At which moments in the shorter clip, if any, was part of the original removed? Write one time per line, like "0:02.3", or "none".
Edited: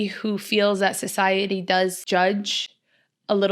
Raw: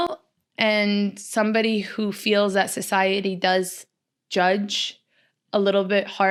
0:02.0